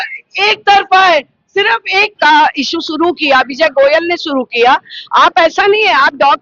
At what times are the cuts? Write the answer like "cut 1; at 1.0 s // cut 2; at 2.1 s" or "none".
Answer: cut 1; at 2.1 s